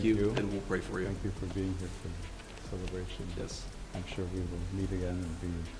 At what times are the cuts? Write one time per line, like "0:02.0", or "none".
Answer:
none